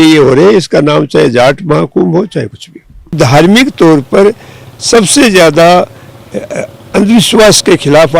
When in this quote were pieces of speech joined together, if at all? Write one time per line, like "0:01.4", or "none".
0:03.0